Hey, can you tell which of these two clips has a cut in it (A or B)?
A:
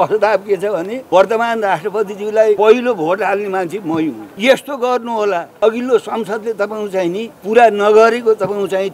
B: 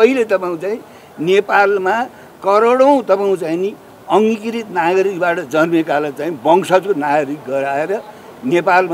A